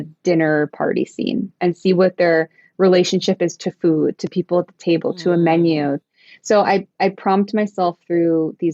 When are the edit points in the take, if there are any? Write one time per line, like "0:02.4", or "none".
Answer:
0:06.0